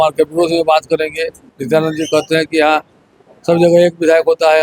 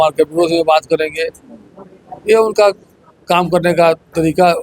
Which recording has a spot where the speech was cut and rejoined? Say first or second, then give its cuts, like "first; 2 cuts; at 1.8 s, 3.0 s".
first; 1 cut; at 1.5 s